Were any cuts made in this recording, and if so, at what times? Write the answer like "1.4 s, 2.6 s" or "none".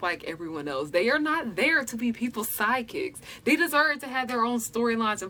none